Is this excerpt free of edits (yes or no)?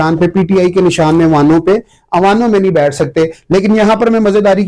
yes